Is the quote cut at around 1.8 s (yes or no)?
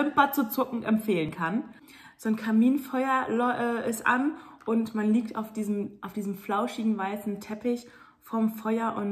yes